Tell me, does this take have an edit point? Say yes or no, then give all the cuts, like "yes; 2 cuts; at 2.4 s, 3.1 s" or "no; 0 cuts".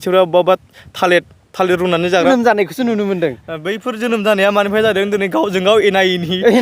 yes; 1 cut; at 2.3 s